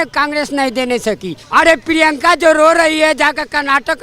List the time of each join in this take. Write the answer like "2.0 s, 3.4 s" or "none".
1.3 s